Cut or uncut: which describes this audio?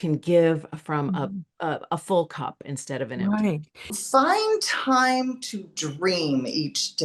cut